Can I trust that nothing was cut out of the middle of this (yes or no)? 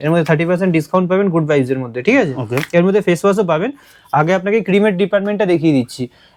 yes